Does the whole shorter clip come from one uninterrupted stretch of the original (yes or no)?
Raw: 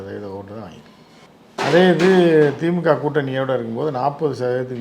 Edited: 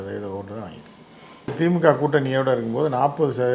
no